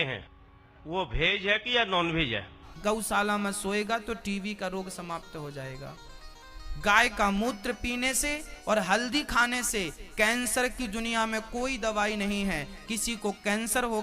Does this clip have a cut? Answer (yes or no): yes